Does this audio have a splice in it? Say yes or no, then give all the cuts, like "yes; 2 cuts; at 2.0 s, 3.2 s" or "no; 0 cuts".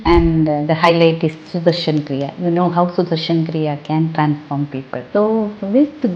yes; 1 cut; at 5.0 s